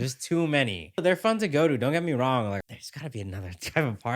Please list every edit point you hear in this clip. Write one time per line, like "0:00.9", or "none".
0:01.0
0:02.6